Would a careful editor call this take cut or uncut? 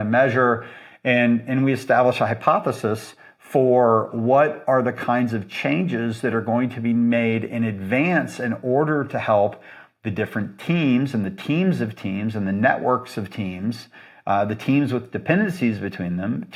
uncut